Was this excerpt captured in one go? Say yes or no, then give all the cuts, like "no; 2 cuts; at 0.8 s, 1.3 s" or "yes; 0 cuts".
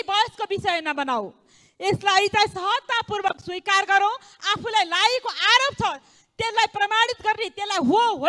yes; 0 cuts